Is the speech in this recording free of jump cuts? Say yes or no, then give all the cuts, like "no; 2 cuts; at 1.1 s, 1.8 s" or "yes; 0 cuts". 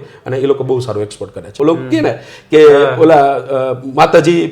no; 1 cut; at 1.5 s